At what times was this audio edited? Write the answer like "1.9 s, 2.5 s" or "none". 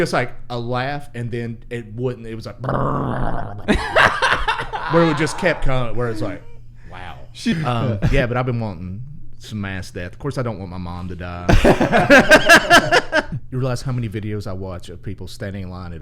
7.5 s, 13.3 s